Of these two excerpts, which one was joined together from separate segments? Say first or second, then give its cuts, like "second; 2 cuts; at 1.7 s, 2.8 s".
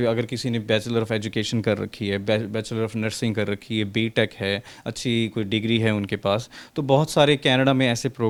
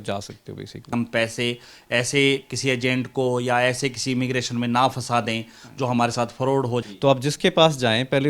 second; 2 cuts; at 0.9 s, 6.9 s